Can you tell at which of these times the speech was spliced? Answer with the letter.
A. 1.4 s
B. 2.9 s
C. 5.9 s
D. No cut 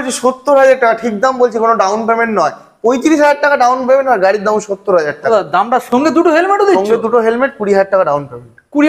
C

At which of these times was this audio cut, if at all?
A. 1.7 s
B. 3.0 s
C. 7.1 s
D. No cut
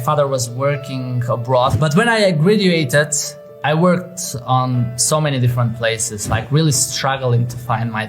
A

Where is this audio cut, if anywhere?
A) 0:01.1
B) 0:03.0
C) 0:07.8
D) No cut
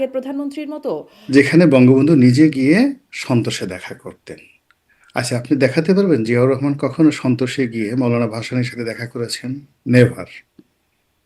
A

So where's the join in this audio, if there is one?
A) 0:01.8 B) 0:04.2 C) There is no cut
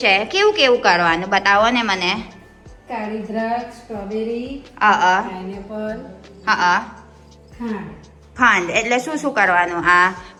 C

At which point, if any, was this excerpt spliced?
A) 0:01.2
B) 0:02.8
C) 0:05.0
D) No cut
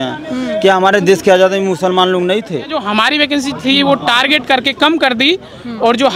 B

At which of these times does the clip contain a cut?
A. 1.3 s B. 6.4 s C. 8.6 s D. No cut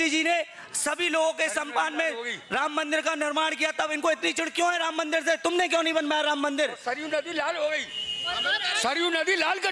D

